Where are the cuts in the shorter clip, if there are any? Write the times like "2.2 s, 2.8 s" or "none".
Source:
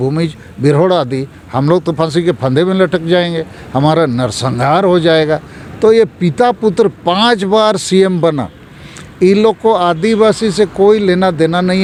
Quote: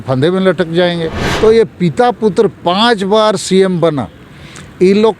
1.2 s